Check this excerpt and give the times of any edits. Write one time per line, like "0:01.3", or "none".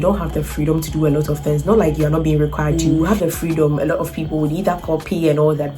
0:02.8